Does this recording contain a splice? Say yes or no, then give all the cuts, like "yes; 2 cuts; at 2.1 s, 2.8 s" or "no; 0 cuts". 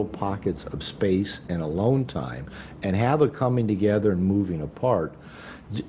no; 0 cuts